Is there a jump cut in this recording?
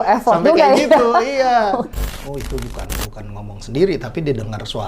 yes; 1 cut; at 1.9 s

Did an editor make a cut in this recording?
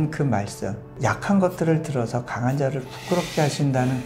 yes; 1 cut; at 1.0 s

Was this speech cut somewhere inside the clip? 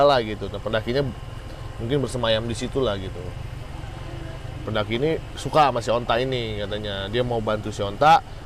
no; 0 cuts

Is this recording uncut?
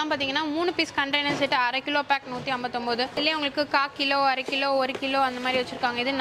yes; 0 cuts

